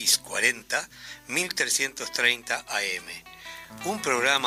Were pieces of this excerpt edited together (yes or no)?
no